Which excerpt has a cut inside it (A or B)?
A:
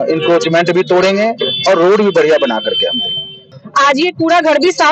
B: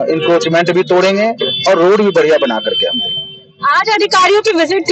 A